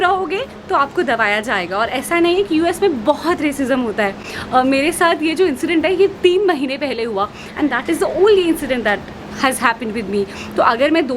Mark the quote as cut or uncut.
uncut